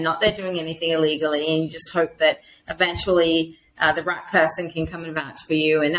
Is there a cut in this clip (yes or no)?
no